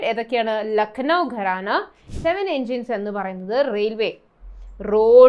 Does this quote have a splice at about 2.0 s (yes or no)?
yes